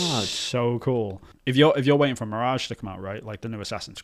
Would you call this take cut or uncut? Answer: cut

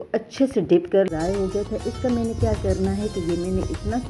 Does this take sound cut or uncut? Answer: cut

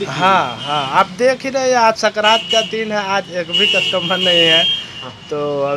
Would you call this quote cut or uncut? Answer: uncut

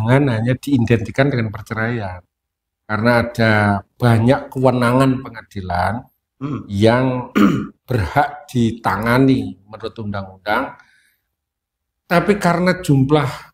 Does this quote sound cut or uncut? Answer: uncut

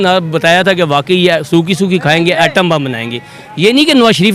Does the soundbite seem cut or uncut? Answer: uncut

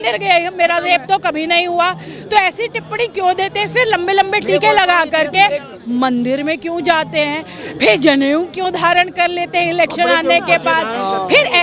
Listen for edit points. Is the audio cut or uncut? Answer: uncut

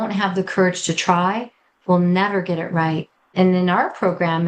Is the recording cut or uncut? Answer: cut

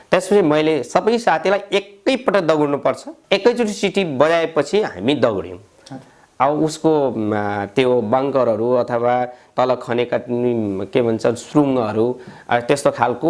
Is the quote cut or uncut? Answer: cut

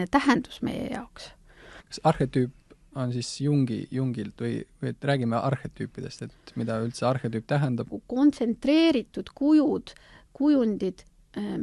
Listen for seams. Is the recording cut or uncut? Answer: cut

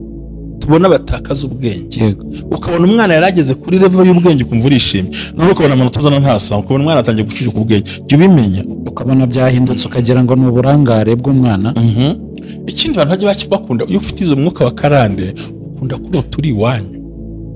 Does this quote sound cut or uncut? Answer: uncut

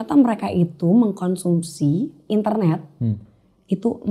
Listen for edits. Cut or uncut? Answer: uncut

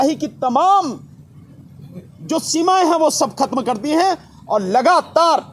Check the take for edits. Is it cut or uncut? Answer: uncut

